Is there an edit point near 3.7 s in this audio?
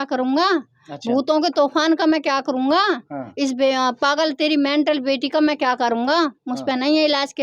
no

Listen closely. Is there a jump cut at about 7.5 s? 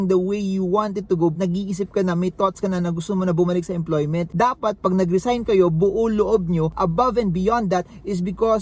no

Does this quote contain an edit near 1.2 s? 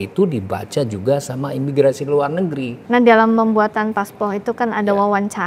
no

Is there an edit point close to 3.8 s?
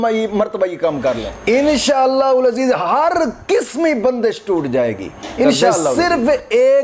no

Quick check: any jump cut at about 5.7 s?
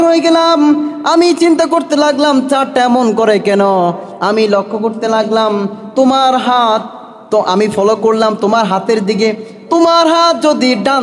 no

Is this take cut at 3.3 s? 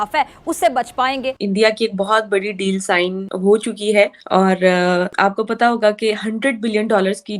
yes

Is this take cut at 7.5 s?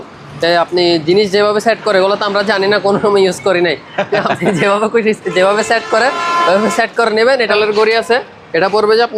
yes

